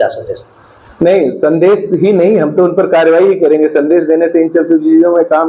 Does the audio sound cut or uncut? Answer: uncut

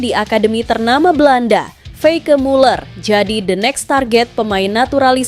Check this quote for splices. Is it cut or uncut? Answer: uncut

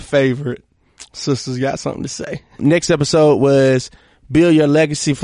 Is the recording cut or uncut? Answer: cut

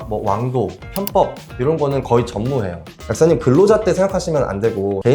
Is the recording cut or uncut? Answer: cut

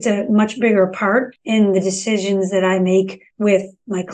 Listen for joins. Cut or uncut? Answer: cut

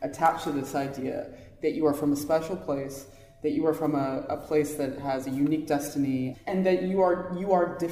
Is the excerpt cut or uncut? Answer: cut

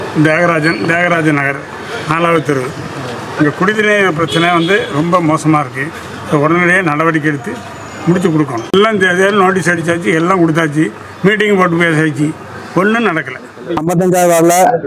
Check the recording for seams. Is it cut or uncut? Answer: cut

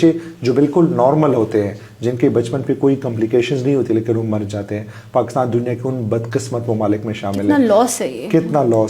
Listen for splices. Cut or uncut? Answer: uncut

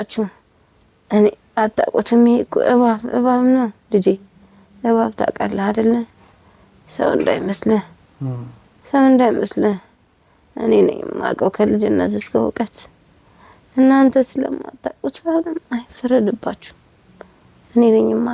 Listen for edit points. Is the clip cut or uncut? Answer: uncut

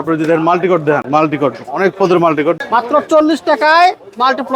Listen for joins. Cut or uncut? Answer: cut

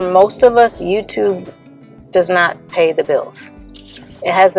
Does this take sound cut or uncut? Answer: uncut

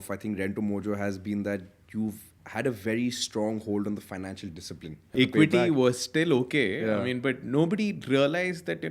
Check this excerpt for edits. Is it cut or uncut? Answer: cut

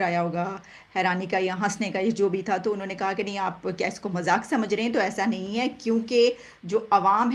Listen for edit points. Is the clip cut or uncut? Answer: uncut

